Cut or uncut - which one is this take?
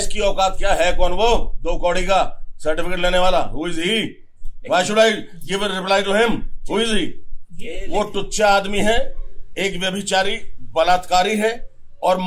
uncut